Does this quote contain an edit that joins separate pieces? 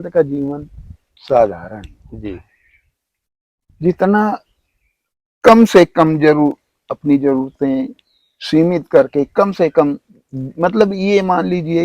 no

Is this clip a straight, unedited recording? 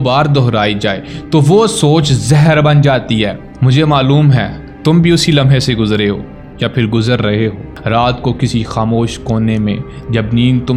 yes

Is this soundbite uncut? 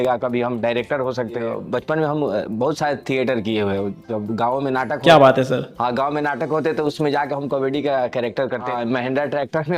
no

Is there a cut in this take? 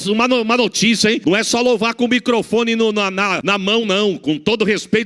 yes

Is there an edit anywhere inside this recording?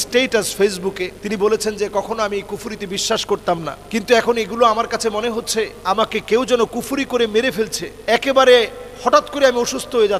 yes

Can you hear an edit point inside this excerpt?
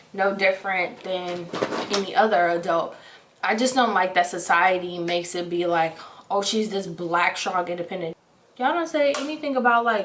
no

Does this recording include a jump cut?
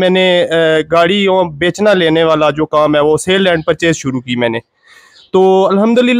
no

